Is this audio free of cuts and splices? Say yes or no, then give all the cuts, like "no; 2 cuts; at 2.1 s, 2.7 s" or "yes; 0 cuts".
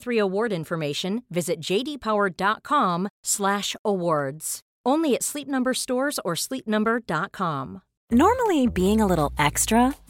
no; 1 cut; at 8.0 s